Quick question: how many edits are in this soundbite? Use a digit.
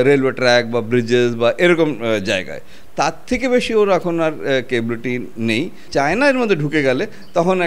1